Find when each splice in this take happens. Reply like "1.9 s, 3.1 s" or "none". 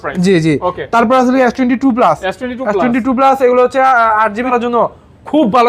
4.5 s